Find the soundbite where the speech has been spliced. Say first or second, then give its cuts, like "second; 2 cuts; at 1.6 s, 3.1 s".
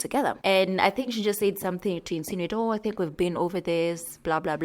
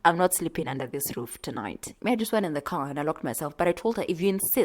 second; 1 cut; at 1.9 s